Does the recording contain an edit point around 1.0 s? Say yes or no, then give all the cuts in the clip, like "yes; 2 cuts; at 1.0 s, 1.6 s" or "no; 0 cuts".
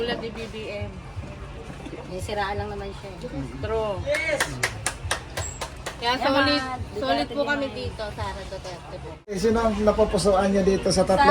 no; 1 cut; at 9.4 s